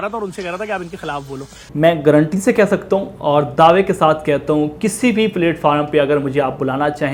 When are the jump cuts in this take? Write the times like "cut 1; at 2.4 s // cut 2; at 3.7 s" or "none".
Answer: none

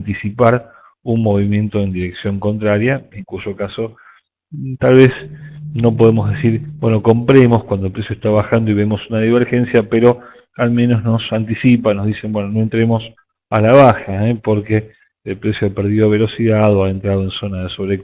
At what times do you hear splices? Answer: cut 1; at 12.9 s

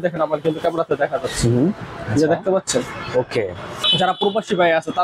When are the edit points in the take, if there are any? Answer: cut 1; at 3.8 s

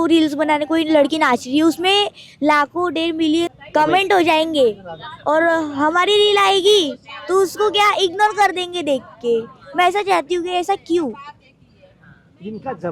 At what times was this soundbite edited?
cut 1; at 3.6 s

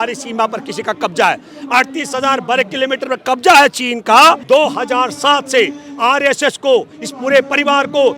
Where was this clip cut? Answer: cut 1; at 4.4 s

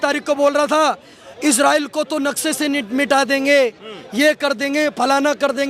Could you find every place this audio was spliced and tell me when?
none

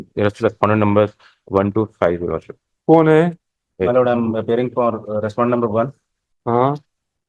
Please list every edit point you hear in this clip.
none

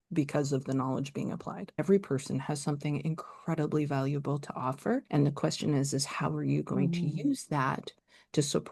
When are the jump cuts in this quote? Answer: cut 1; at 1.8 s // cut 2; at 5.1 s

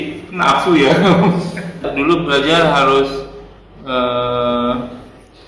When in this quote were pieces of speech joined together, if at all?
cut 1; at 1.9 s

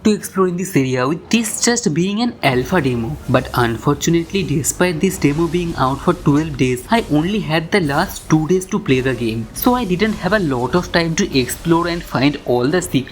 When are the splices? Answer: none

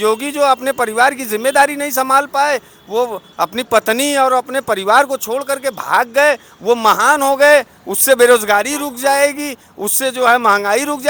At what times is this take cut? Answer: none

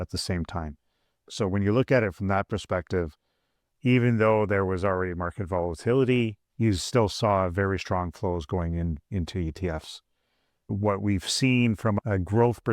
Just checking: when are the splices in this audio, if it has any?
cut 1; at 6.4 s

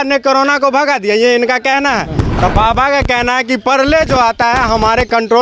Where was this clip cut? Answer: cut 1; at 2.2 s

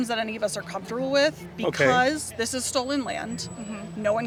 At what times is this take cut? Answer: none

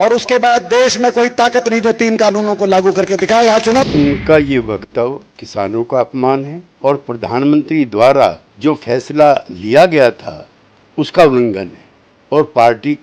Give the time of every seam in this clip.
cut 1; at 3.9 s

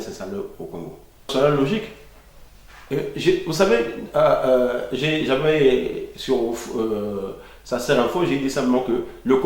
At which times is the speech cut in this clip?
cut 1; at 1.3 s

